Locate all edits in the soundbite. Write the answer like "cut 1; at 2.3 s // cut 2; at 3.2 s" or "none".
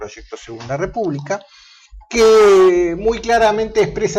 cut 1; at 2.5 s